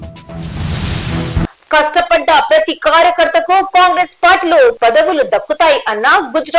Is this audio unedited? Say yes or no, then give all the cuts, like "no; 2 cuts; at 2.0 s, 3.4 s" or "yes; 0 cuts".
no; 1 cut; at 1.4 s